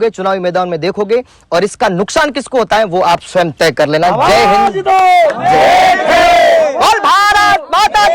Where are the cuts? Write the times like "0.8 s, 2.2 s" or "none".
none